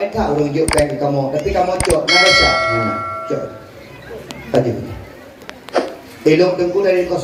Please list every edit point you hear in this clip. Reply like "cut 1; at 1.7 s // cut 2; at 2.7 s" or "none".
none